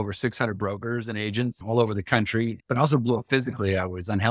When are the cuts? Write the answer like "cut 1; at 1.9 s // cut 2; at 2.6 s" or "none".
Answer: cut 1; at 1.6 s // cut 2; at 2.6 s